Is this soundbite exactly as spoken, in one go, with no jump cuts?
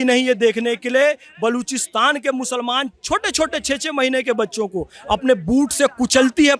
yes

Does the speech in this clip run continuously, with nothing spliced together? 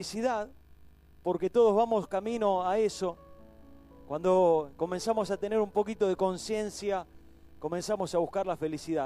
no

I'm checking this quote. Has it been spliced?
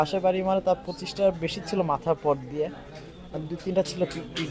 no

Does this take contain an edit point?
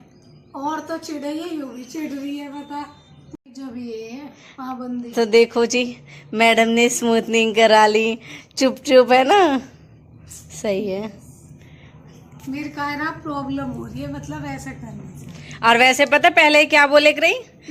yes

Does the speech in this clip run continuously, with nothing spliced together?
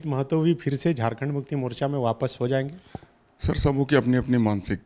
yes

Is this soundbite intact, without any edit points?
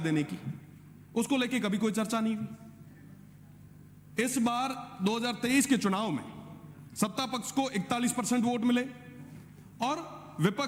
yes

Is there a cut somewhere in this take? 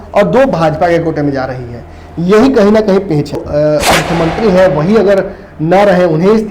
yes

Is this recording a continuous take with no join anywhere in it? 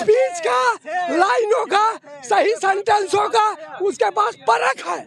yes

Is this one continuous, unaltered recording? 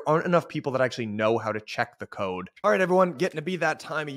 no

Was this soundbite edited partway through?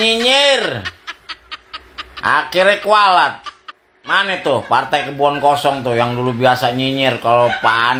no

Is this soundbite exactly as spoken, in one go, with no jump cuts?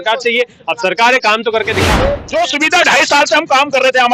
no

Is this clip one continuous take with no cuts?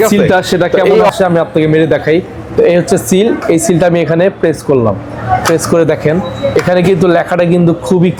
yes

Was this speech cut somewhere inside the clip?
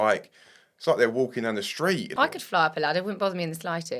yes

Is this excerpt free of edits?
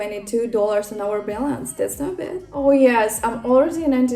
no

